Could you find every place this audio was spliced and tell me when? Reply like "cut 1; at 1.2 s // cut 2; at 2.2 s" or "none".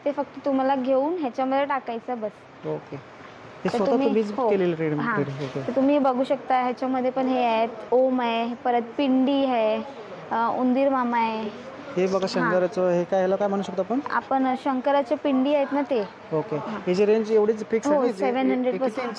none